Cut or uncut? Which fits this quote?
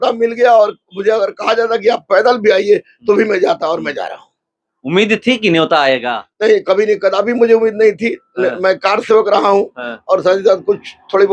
uncut